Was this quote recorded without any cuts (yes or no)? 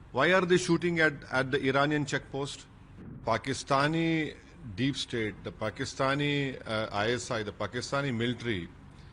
no